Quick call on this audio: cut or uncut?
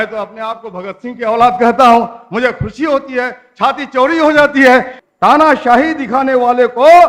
cut